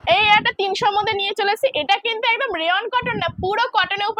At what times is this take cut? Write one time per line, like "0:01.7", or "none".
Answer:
none